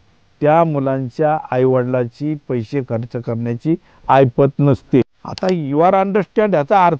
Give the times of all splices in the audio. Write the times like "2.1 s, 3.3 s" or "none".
5.2 s